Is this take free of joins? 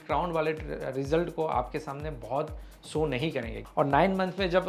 no; 1 cut; at 3.6 s

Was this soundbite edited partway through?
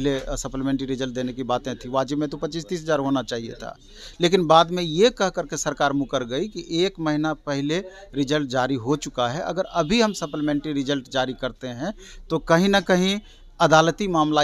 no; 0 cuts

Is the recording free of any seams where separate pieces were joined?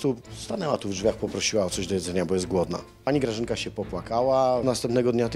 no; 2 cuts; at 2.9 s, 4.6 s

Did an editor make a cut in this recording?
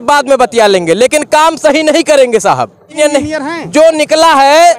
yes; 1 cut; at 2.9 s

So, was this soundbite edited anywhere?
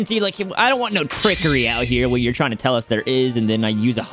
no; 0 cuts

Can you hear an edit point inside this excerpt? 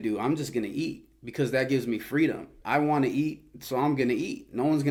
no; 0 cuts

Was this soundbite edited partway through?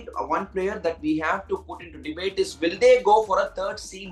no; 0 cuts

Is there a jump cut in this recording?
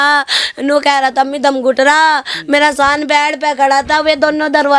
no; 0 cuts

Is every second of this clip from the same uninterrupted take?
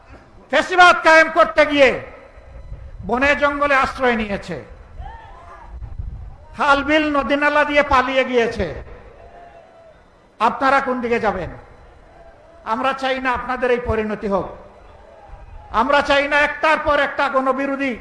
yes; 0 cuts

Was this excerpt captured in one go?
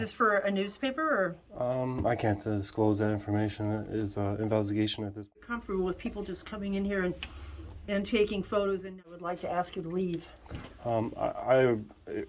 no; 2 cuts; at 5.4 s, 9.1 s

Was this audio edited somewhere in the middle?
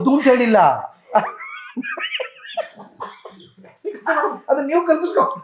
no; 0 cuts

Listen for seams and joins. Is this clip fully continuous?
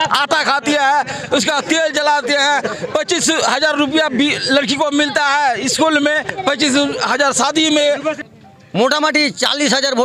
no; 1 cut; at 8.2 s

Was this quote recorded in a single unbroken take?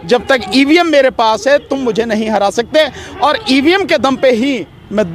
yes; 0 cuts

